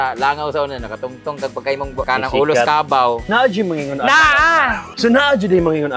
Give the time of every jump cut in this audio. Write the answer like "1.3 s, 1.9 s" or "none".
2.1 s, 3.3 s, 4.9 s